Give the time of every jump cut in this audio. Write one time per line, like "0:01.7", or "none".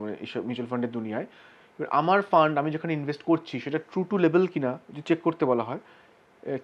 none